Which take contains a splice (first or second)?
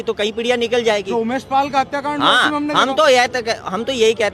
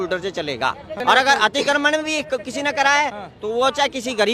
second